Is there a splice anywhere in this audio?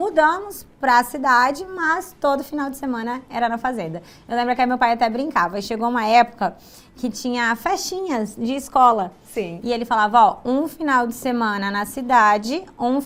no; 0 cuts

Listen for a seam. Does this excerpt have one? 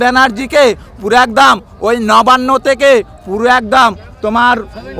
no; 0 cuts

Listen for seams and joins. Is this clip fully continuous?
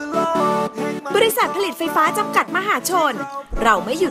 no; 1 cut; at 1.0 s

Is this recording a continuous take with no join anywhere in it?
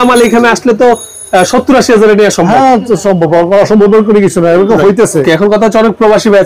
no; 1 cut; at 5.2 s

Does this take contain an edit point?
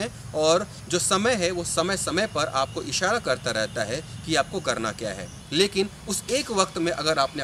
yes; 1 cut; at 5.3 s

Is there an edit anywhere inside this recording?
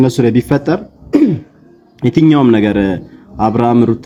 no; 0 cuts

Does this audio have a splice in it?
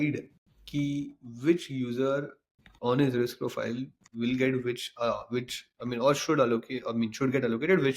no; 0 cuts

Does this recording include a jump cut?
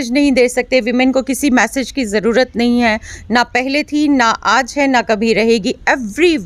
no; 0 cuts

